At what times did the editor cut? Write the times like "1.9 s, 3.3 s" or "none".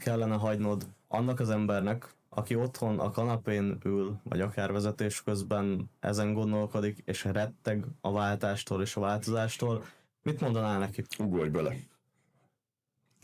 none